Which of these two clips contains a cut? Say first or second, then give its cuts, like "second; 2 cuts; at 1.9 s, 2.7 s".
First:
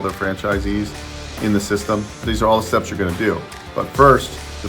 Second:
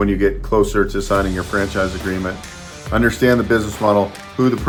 first; 1 cut; at 2.2 s